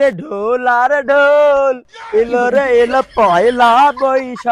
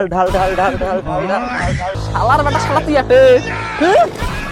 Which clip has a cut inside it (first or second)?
second